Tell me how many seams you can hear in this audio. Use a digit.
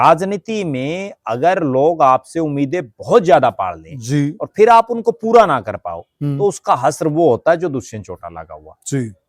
0